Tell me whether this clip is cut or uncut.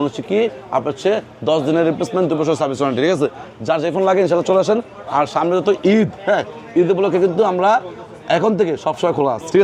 uncut